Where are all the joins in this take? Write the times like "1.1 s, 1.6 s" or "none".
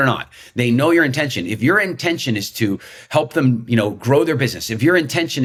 none